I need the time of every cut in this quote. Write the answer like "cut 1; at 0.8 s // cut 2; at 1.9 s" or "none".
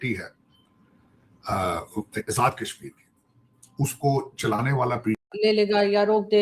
cut 1; at 5.2 s